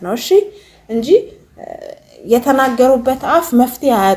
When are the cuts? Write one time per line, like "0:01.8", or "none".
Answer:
none